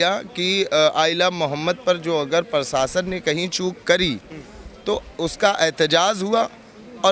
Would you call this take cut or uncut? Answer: uncut